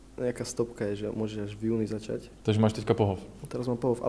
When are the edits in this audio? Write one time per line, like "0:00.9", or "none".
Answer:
0:02.3